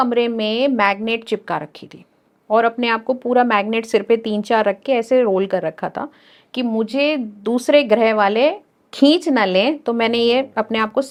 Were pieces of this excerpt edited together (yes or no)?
no